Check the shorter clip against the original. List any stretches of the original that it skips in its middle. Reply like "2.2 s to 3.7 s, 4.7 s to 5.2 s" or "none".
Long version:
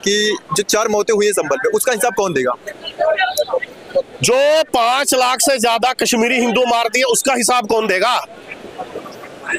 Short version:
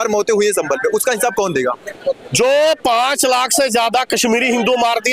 2.7 s to 3.8 s